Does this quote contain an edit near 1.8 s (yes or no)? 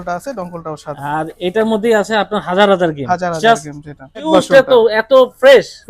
no